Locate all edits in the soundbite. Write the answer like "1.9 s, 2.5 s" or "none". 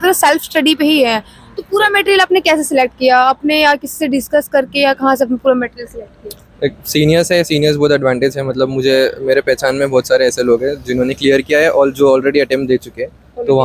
none